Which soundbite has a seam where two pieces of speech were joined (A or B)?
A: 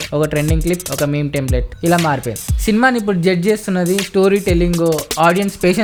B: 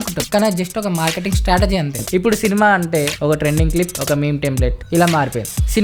B